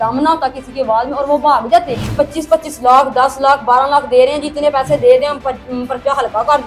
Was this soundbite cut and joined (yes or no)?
yes